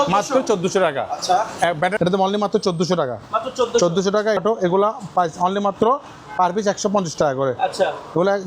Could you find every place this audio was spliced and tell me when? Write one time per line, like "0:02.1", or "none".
0:01.9
0:04.4